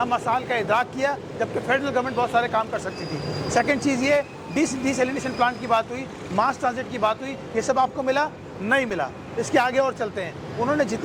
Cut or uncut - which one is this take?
uncut